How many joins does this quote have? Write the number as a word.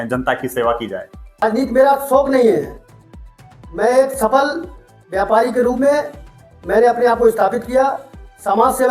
one